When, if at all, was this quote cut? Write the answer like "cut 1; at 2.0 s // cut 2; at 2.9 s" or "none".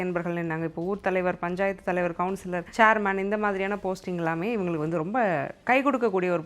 cut 1; at 2.6 s